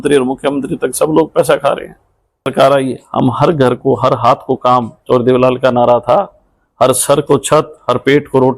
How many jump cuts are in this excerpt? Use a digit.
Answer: 1